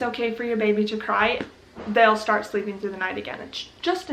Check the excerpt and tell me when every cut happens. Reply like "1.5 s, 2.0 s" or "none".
1.8 s